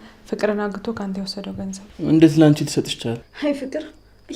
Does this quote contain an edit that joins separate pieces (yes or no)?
yes